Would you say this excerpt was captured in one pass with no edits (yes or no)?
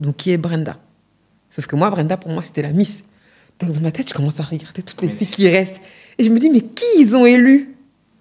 yes